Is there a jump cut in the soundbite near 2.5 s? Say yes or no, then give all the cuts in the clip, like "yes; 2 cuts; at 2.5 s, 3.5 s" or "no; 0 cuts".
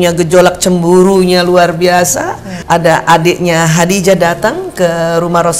yes; 1 cut; at 2.5 s